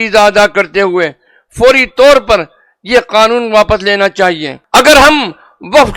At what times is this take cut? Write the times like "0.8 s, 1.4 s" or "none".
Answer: 4.5 s